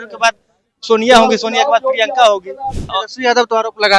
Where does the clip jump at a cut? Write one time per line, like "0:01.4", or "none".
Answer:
0:02.9

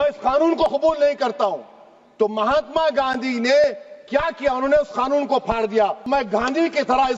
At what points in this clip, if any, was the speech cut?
0:06.1

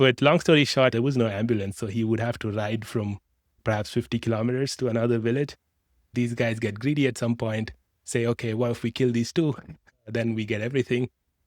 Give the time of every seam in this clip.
0:00.9
0:03.6
0:06.1

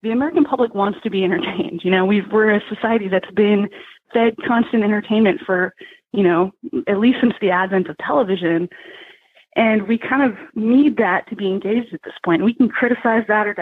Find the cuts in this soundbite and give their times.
none

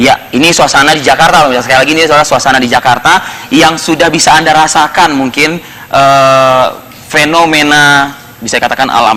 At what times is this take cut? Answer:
0:06.4

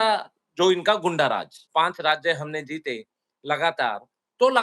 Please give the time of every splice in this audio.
0:01.6

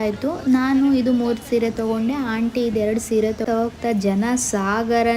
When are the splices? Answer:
0:03.4

